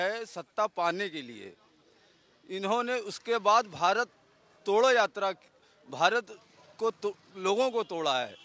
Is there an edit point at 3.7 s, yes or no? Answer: no